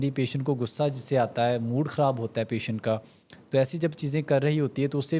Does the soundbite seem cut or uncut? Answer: uncut